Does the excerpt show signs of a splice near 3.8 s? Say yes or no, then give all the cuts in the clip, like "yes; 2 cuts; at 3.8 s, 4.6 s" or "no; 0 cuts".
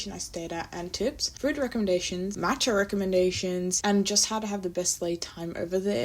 yes; 3 cuts; at 1.3 s, 2.3 s, 3.8 s